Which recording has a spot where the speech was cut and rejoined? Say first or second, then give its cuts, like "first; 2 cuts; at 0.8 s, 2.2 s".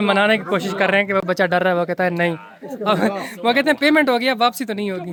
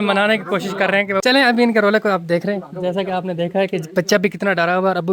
second; 1 cut; at 1.2 s